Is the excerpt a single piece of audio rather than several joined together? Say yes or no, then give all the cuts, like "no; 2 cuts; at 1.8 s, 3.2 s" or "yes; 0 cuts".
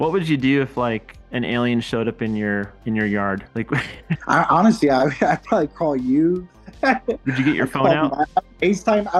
no; 1 cut; at 4.1 s